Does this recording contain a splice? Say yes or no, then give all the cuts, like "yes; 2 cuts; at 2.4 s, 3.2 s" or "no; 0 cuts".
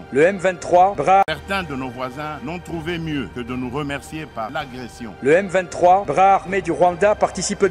yes; 1 cut; at 1.2 s